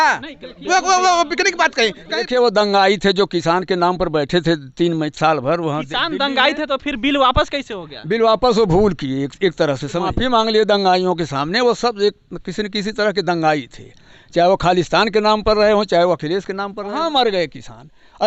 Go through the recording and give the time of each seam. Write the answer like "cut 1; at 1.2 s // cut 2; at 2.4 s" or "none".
cut 1; at 2.2 s // cut 2; at 10.1 s // cut 3; at 16.8 s